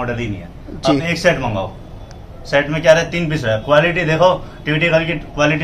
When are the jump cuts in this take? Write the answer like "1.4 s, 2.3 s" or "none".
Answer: none